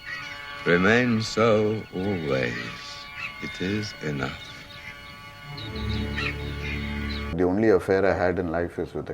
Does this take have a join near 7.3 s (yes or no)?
yes